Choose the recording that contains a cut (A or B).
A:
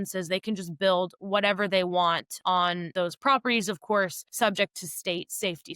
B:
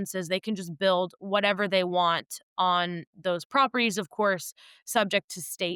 A